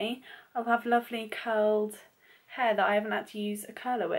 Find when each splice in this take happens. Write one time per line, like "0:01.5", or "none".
none